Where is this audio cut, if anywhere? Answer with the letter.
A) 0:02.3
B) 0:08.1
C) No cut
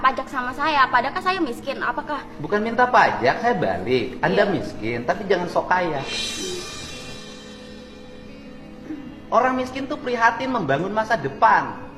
C